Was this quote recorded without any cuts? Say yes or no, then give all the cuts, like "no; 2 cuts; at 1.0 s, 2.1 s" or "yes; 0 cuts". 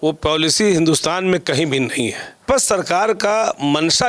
no; 1 cut; at 2.4 s